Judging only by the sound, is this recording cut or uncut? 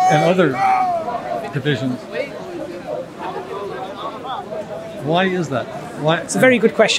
uncut